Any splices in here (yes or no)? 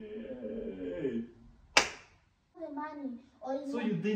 yes